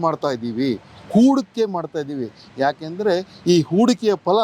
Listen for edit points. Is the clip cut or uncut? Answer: uncut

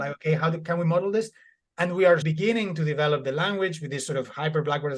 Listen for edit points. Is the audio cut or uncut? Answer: cut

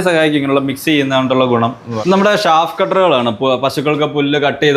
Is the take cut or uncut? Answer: cut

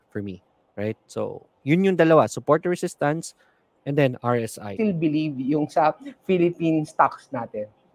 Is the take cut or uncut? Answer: cut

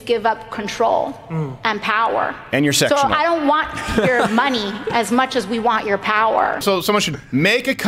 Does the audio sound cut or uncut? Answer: cut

